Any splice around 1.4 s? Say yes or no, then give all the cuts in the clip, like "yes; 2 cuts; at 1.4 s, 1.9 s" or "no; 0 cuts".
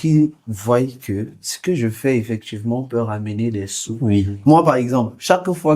no; 1 cut; at 4.3 s